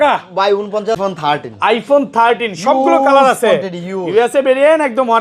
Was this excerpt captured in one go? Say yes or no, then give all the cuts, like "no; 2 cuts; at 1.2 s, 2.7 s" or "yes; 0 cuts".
no; 1 cut; at 1.0 s